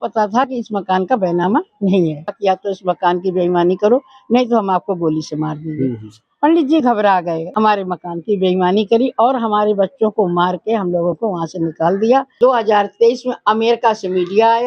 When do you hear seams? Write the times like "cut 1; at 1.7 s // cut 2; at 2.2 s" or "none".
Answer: cut 1; at 2.4 s // cut 2; at 7.4 s // cut 3; at 12.3 s